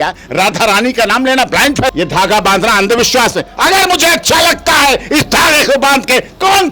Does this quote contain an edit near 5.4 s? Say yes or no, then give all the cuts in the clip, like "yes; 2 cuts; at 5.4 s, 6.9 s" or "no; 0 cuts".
no; 1 cut; at 1.9 s